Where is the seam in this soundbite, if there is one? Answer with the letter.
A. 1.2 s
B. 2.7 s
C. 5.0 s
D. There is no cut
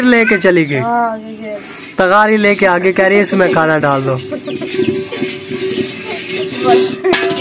D